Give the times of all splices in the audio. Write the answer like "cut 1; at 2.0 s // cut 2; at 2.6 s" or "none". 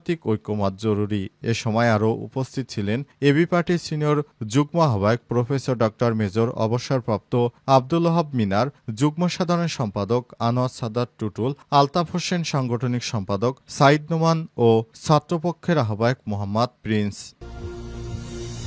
cut 1; at 17.4 s